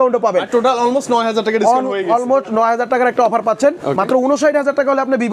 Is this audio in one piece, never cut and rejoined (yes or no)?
yes